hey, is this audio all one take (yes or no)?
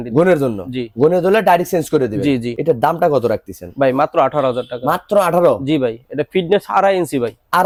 yes